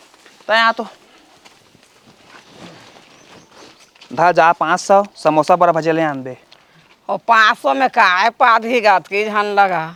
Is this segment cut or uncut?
uncut